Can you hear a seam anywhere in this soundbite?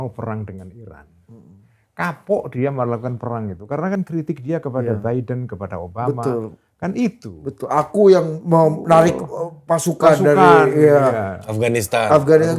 no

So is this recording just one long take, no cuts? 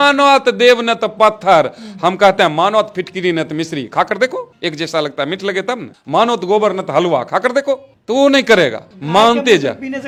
yes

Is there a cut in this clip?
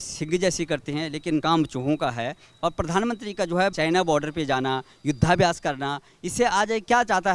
yes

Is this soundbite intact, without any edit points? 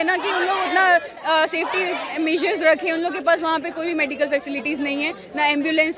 yes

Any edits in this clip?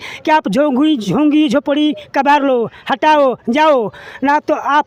no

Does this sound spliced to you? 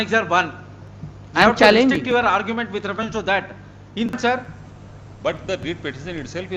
yes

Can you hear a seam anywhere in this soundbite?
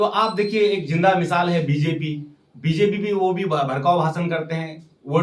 no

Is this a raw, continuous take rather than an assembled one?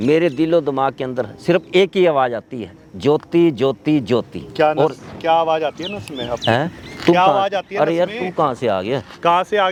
yes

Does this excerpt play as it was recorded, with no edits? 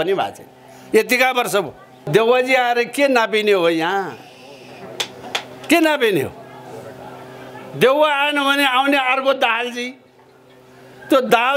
no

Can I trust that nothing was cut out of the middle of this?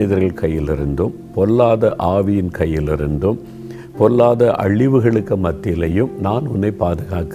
yes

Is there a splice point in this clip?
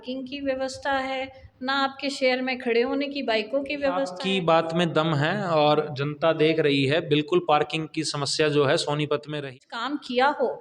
yes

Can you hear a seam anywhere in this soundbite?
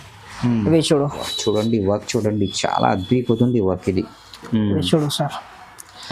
yes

